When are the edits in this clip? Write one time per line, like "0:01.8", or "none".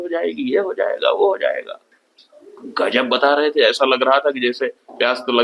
none